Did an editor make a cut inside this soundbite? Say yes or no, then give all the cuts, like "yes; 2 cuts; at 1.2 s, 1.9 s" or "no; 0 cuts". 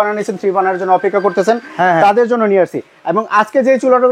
no; 0 cuts